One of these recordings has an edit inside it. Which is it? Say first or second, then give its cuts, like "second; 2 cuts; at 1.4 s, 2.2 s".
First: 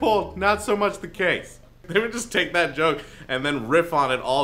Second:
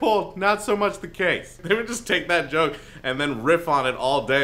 second; 1 cut; at 1.5 s